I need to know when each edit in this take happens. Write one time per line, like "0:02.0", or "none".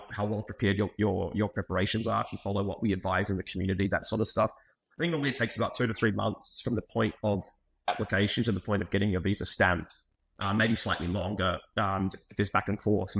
none